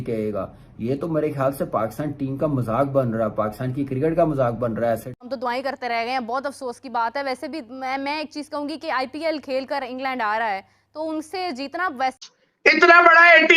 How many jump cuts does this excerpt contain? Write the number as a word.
two